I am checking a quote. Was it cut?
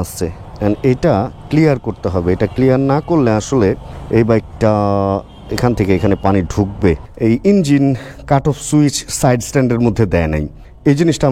yes; 1 cut; at 7.1 s

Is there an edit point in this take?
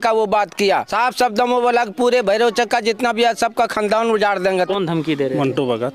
yes; 2 cuts; at 0.9 s, 4.5 s

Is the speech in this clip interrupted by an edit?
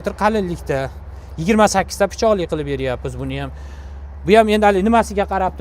no; 0 cuts

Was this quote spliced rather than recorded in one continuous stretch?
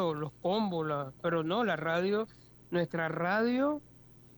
no; 0 cuts

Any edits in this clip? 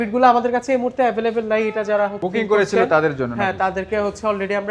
no; 0 cuts

